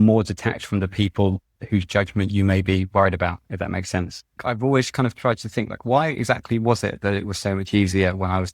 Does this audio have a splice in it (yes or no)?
yes